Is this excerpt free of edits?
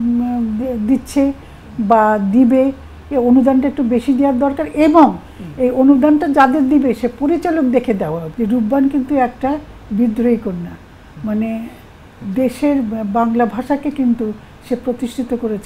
no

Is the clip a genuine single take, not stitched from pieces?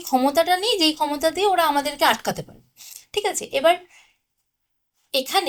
yes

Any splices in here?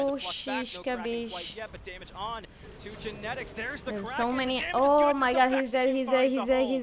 no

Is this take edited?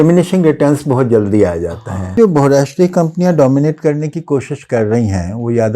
yes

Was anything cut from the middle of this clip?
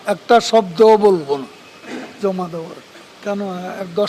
yes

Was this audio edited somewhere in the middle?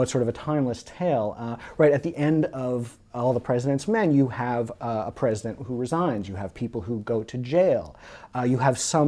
no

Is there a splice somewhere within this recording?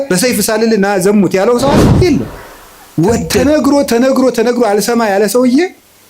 yes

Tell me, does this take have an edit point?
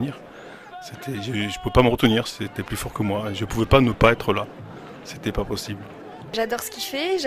yes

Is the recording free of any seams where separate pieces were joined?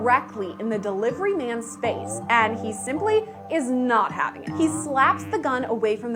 yes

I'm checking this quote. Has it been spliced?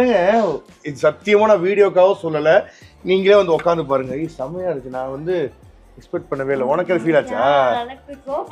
no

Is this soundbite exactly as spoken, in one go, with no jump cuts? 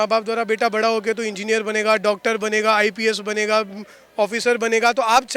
yes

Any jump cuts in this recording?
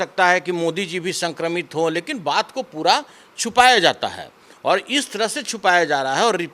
no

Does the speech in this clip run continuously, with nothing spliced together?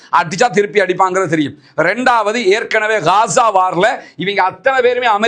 yes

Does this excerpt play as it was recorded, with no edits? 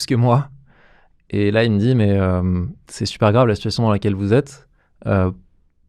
yes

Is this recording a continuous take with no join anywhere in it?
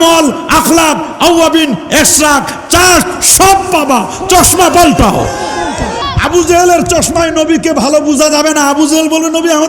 no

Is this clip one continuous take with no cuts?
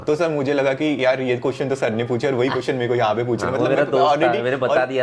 yes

